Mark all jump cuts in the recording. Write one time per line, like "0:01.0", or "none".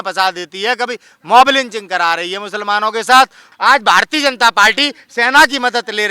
0:03.5